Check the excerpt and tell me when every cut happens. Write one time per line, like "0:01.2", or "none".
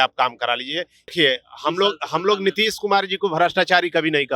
0:01.1